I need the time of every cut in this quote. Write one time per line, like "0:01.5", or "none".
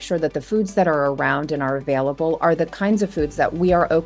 none

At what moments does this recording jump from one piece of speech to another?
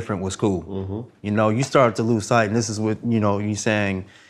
none

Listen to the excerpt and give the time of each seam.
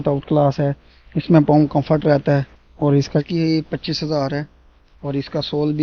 0:03.2

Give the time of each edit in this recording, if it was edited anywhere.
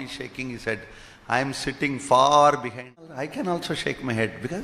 0:03.2

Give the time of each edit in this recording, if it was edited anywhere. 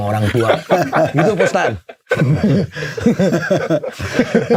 none

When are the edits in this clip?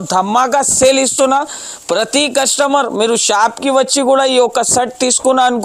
none

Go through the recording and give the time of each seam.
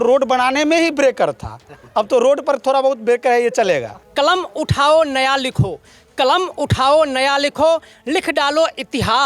0:04.0

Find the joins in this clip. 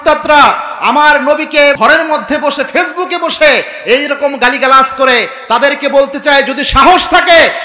0:01.7

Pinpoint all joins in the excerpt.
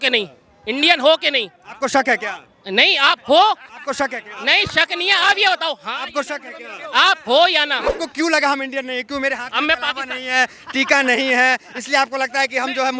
0:08.0

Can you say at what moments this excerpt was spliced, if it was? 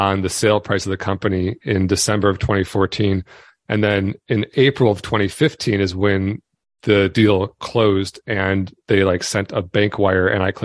none

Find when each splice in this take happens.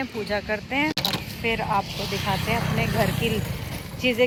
none

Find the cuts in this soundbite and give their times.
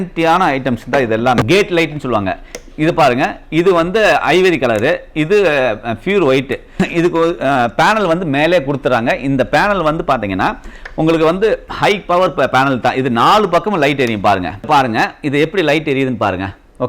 0:01.4
0:14.7

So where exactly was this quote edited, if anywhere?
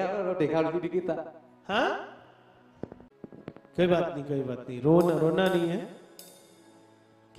0:03.0

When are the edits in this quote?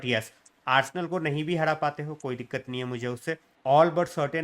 0:03.5

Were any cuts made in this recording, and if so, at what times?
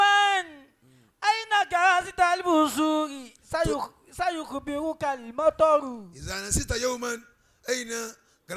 none

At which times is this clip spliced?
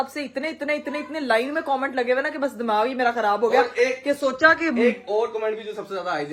none

